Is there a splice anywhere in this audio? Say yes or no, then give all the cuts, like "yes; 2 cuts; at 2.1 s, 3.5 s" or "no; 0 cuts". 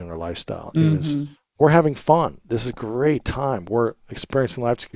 no; 0 cuts